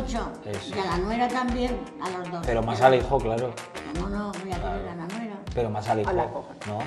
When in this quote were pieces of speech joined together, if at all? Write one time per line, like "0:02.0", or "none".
none